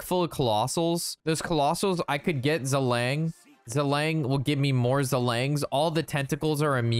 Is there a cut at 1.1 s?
yes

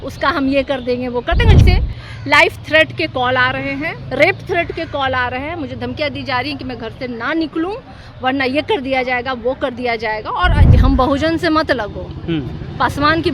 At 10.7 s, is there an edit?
yes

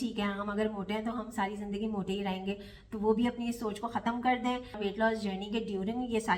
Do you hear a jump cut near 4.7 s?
yes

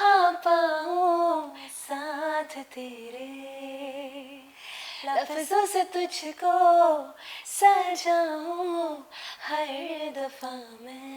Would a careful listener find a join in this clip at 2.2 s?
no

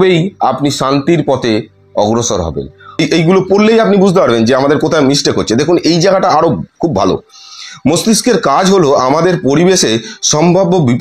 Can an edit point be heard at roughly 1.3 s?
no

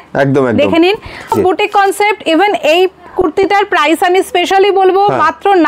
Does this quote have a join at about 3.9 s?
no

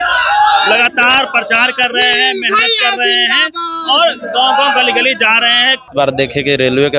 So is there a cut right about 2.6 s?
no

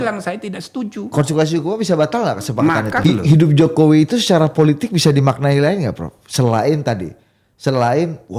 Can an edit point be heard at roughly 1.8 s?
no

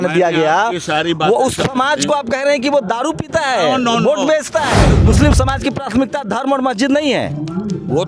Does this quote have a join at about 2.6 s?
no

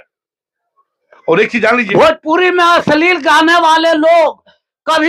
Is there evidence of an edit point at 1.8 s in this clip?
yes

